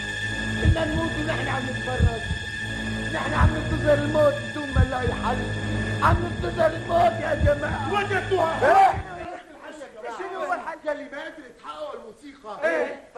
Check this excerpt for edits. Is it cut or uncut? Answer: uncut